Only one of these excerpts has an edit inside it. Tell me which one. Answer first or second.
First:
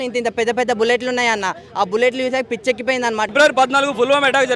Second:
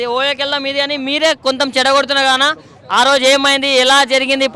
first